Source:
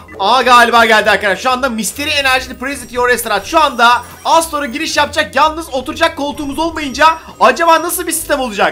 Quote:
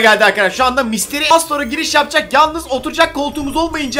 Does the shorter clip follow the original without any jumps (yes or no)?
no